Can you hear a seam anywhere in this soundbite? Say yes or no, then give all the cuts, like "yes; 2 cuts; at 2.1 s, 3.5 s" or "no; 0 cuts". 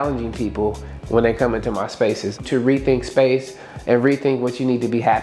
no; 0 cuts